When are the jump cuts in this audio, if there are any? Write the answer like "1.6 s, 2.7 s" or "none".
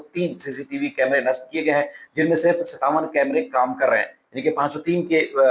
none